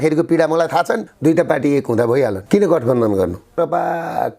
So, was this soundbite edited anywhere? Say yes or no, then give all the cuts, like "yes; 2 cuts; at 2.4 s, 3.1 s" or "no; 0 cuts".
yes; 2 cuts; at 1.1 s, 3.5 s